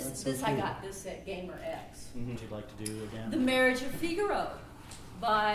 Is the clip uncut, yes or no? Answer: yes